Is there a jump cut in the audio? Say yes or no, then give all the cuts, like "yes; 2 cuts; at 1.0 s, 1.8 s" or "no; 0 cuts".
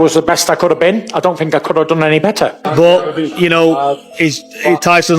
yes; 1 cut; at 2.6 s